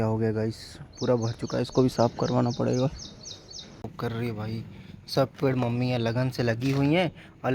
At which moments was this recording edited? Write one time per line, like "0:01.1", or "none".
0:03.8